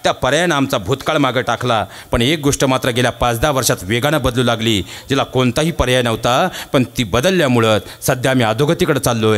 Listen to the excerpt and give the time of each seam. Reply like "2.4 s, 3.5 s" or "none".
none